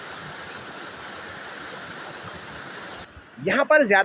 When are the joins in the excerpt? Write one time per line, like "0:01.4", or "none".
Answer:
0:03.0